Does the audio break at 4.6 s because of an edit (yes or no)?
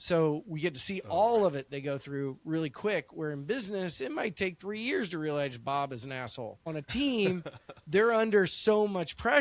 no